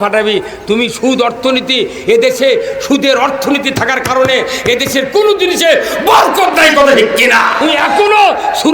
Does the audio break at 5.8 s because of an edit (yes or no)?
no